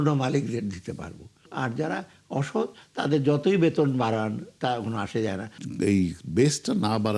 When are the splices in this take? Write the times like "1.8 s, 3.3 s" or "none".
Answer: 1.5 s, 5.5 s